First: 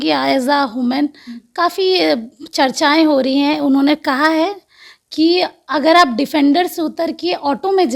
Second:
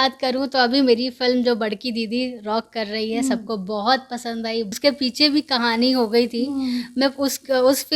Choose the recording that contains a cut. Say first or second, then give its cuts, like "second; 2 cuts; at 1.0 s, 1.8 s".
second; 1 cut; at 4.7 s